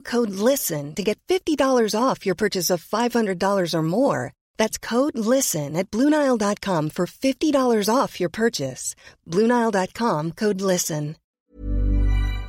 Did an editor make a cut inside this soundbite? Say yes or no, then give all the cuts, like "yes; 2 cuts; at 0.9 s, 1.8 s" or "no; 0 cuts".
yes; 1 cut; at 11.4 s